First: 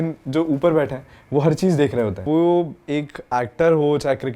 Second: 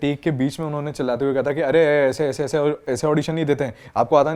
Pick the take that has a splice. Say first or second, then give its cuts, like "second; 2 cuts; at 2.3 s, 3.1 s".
first; 1 cut; at 2.2 s